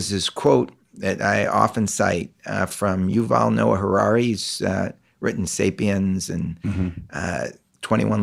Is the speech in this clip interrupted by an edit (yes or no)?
no